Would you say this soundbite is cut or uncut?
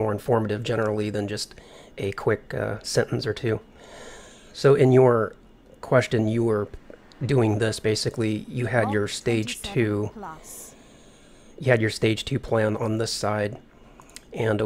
uncut